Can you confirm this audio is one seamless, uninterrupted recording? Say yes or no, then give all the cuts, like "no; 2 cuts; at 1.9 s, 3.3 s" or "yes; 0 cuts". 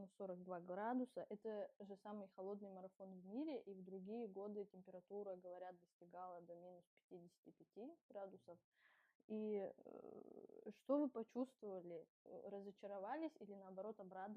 yes; 0 cuts